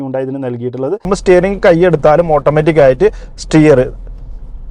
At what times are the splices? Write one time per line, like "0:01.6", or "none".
0:01.1